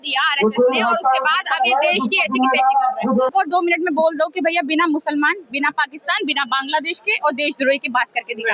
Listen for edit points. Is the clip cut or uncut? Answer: cut